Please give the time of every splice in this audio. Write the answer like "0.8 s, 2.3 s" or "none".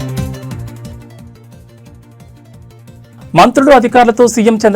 none